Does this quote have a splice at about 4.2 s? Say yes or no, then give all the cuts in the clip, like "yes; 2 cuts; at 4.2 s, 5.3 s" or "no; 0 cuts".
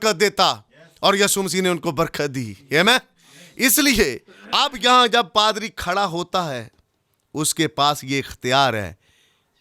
no; 0 cuts